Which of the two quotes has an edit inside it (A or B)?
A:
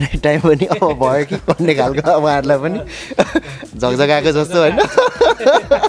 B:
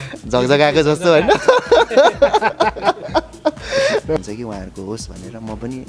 B